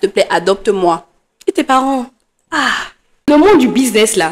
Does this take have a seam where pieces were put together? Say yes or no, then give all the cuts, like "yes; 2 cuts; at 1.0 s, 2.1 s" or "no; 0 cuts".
yes; 1 cut; at 3.2 s